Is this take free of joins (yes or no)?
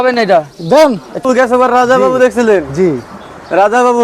no